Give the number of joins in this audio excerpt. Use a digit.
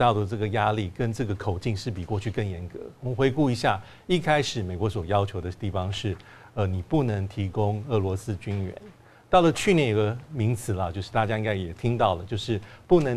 0